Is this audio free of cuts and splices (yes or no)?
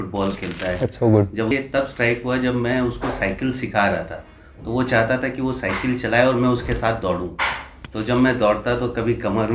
no